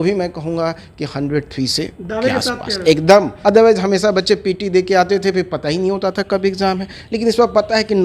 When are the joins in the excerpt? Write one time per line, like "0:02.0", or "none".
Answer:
0:03.3